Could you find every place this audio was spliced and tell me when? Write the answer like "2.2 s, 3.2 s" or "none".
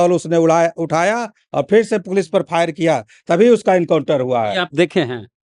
none